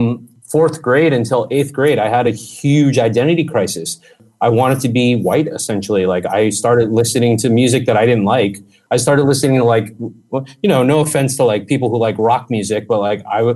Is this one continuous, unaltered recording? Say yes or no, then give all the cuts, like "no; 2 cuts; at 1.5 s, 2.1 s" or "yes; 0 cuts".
no; 2 cuts; at 4.2 s, 8.7 s